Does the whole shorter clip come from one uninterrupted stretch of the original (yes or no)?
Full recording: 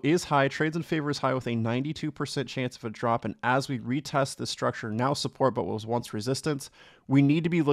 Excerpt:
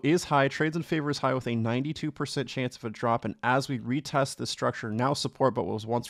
yes